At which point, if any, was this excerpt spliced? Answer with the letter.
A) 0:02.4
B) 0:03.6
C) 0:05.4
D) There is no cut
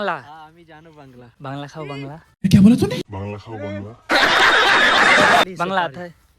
C